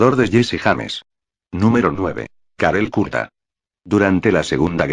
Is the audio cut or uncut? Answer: uncut